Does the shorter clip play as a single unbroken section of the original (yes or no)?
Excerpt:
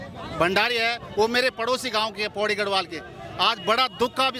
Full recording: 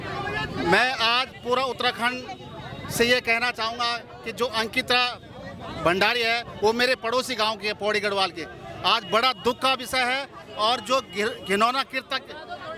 yes